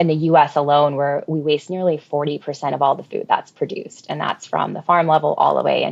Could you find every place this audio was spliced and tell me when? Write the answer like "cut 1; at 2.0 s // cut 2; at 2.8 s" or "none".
none